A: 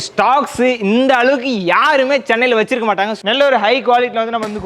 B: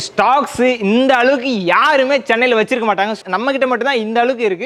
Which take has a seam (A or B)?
A